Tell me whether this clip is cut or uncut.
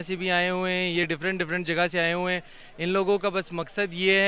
uncut